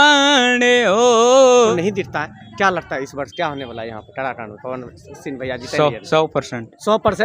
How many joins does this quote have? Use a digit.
1